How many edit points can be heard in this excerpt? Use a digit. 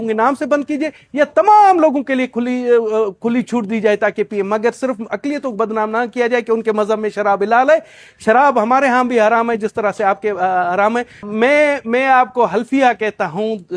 1